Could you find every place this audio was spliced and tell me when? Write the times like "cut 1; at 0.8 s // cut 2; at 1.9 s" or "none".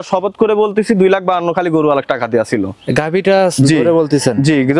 none